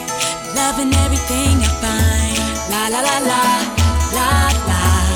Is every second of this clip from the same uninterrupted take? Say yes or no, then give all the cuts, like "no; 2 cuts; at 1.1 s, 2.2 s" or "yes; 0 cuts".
yes; 0 cuts